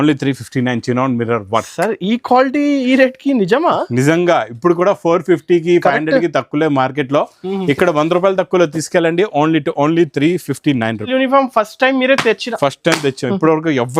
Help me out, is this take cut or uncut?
cut